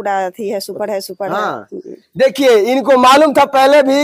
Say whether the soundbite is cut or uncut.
uncut